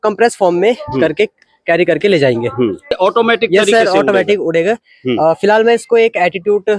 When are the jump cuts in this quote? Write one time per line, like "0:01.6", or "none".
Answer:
0:02.9